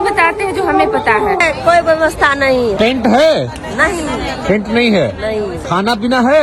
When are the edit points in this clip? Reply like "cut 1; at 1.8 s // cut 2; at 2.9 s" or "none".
cut 1; at 1.4 s // cut 2; at 2.7 s